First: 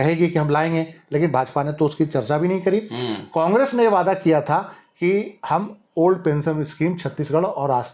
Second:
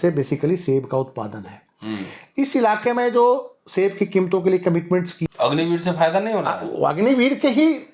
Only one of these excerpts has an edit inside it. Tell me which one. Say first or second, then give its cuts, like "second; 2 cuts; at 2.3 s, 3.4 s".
second; 1 cut; at 5.1 s